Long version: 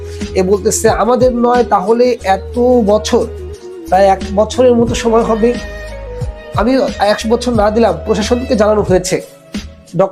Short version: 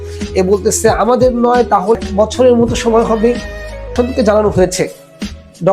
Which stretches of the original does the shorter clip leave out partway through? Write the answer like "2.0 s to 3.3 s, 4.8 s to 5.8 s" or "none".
2.0 s to 4.2 s, 6.1 s to 8.2 s